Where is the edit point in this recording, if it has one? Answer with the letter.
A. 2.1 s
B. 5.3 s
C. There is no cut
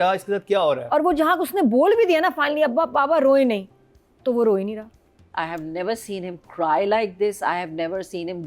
B